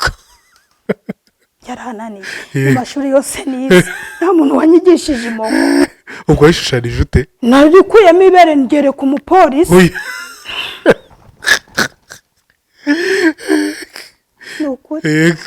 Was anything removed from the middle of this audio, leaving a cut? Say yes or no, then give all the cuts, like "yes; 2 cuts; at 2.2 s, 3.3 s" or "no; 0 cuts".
no; 0 cuts